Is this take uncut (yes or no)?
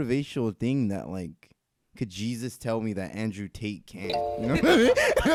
yes